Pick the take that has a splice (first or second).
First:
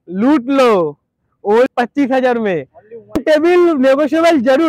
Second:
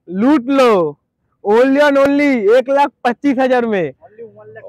first